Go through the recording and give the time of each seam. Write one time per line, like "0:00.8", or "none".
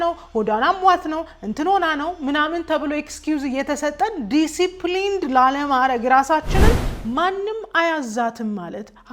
0:06.9